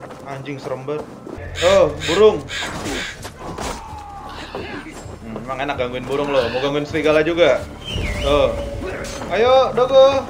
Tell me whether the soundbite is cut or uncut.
cut